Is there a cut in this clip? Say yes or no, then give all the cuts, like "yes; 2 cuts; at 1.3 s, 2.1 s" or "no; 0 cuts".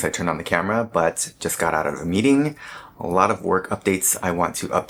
no; 0 cuts